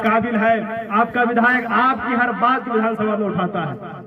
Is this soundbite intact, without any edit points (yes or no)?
yes